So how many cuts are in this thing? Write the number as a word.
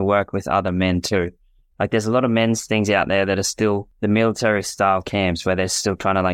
two